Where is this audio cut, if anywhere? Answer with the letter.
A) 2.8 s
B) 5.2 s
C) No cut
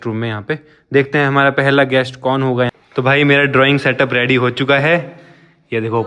A